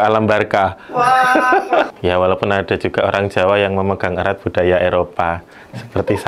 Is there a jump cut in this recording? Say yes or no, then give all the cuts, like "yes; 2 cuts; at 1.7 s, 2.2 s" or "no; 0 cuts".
yes; 1 cut; at 1.9 s